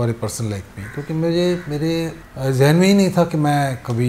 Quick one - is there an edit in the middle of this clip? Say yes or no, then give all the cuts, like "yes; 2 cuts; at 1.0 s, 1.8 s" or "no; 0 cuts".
yes; 1 cut; at 2.2 s